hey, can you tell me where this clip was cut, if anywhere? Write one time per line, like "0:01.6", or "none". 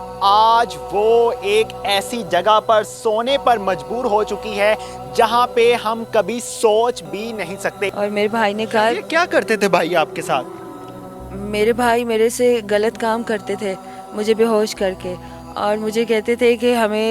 0:07.8